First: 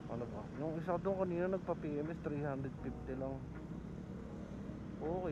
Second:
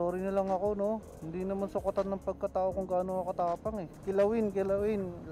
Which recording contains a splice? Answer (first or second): second